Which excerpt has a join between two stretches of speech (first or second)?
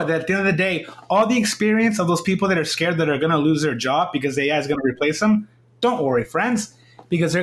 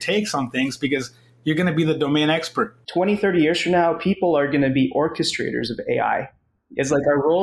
second